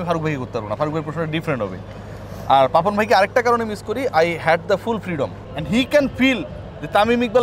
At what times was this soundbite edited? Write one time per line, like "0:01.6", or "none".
0:05.5